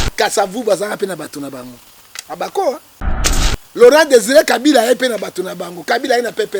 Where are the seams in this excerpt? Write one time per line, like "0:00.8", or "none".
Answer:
none